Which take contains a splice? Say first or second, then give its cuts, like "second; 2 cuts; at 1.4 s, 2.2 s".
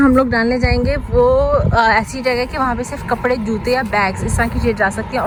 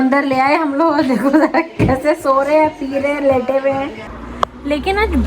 second; 1 cut; at 4.2 s